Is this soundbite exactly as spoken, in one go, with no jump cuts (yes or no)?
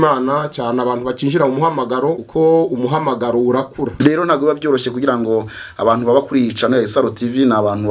no